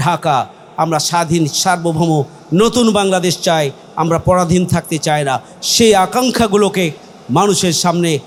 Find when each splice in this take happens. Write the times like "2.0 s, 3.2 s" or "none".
none